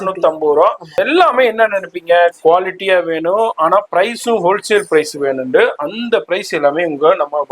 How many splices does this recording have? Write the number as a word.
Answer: one